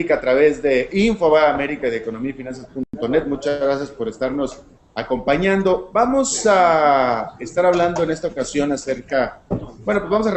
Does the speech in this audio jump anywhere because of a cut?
no; 0 cuts

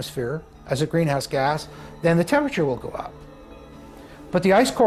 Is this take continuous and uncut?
yes; 0 cuts

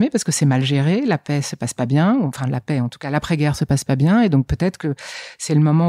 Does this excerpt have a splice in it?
no; 0 cuts

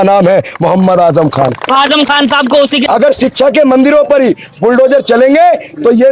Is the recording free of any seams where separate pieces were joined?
no; 1 cut; at 2.8 s

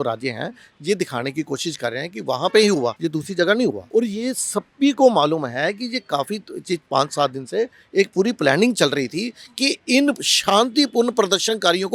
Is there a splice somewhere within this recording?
yes; 2 cuts; at 3.0 s, 3.8 s

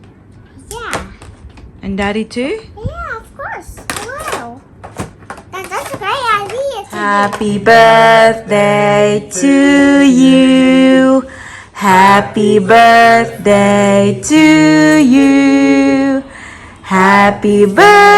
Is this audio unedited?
no; 1 cut; at 7.1 s

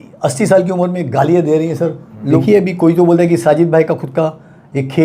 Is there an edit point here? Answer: yes; 1 cut; at 2.4 s

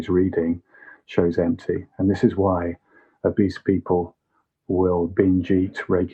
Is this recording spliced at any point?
no; 0 cuts

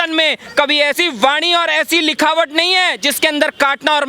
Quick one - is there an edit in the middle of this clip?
yes; 1 cut; at 1.0 s

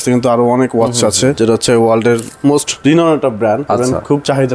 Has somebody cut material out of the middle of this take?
yes; 3 cuts; at 1.3 s, 2.7 s, 3.8 s

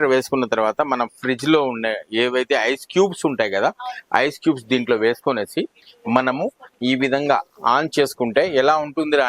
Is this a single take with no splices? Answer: yes; 0 cuts

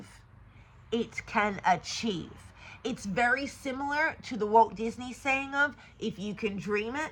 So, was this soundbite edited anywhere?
no; 0 cuts

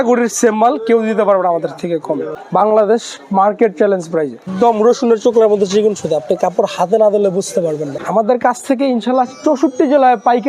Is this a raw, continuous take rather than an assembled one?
no; 3 cuts; at 2.3 s, 4.4 s, 8.0 s

